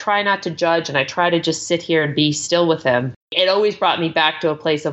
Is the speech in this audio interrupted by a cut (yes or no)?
yes